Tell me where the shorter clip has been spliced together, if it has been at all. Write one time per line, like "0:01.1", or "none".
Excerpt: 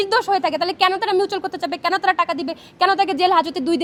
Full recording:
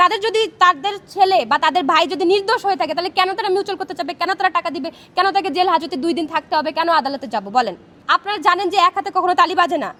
none